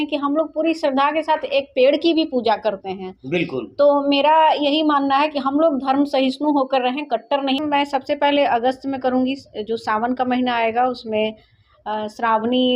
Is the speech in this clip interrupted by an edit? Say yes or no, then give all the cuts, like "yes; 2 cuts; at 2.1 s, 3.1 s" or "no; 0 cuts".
yes; 1 cut; at 7.6 s